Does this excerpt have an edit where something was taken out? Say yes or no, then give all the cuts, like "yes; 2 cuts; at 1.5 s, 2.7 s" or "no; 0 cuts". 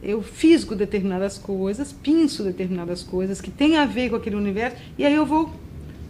no; 0 cuts